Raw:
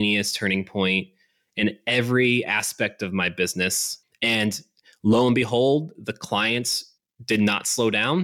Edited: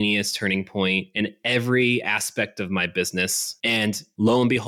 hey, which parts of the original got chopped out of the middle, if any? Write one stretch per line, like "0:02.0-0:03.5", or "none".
0:01.1-0:01.5
0:04.2-0:04.6